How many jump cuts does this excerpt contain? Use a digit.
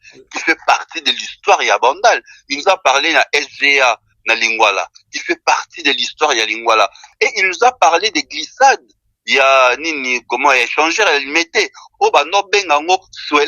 1